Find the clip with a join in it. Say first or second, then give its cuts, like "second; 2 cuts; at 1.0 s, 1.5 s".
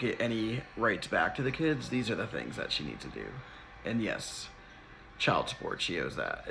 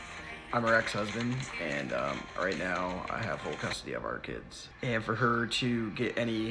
second; 1 cut; at 4.6 s